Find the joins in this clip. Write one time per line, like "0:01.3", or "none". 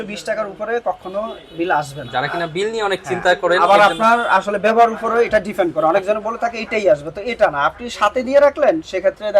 none